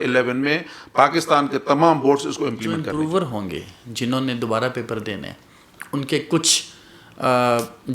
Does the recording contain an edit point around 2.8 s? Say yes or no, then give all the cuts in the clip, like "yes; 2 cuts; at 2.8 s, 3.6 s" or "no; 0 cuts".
yes; 1 cut; at 2.8 s